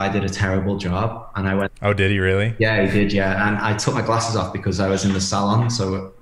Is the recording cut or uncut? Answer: uncut